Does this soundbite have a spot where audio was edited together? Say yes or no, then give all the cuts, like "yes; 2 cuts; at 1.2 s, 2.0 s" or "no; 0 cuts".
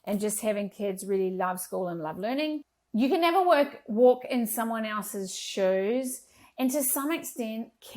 yes; 1 cut; at 2.6 s